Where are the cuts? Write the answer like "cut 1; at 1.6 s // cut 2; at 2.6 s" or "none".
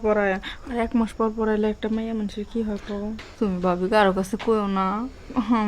cut 1; at 3.0 s